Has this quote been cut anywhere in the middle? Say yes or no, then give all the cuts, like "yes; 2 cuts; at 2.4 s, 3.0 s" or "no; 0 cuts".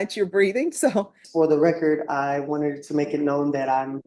yes; 1 cut; at 1.2 s